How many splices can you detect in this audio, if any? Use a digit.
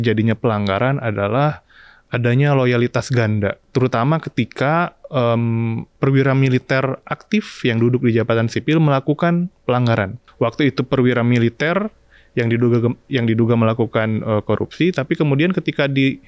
3